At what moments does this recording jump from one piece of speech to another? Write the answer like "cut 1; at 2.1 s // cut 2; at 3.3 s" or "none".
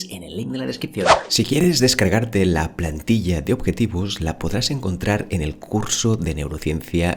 cut 1; at 1.2 s